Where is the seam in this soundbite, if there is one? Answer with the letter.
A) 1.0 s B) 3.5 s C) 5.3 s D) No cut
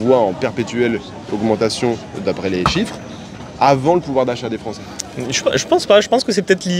D